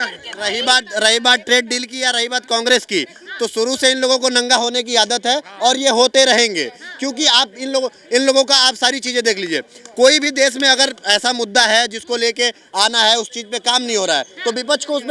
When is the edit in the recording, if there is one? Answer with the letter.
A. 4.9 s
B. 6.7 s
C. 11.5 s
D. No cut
D